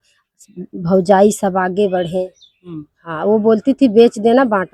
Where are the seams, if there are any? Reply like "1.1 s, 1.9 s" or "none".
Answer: none